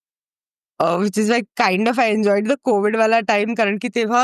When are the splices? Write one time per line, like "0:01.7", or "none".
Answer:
none